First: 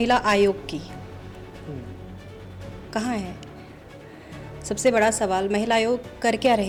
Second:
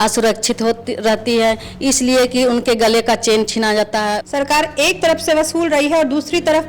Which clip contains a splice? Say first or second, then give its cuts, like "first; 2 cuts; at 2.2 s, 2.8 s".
second; 1 cut; at 4.2 s